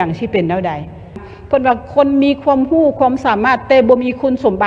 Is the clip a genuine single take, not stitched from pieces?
no; 1 cut; at 1.2 s

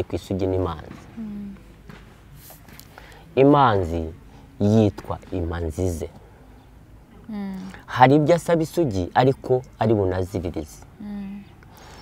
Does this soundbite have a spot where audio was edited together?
no; 0 cuts

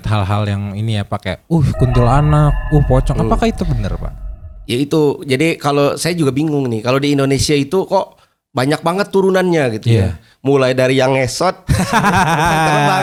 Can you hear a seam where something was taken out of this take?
no; 0 cuts

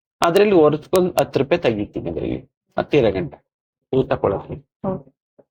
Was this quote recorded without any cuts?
yes; 0 cuts

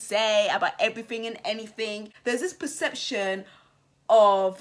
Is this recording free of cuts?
no; 1 cut; at 2.1 s

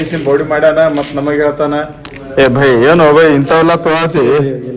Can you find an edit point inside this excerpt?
no; 0 cuts

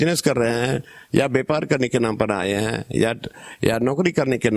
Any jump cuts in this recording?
no; 0 cuts

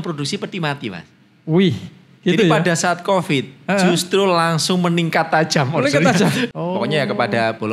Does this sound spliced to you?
yes; 1 cut; at 6.5 s

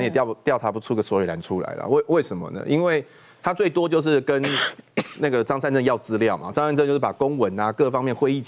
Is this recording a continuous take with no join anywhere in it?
yes; 0 cuts

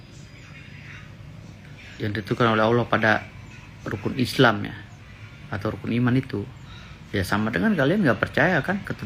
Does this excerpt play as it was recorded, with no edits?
yes; 0 cuts

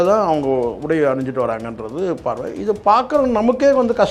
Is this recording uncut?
yes; 0 cuts

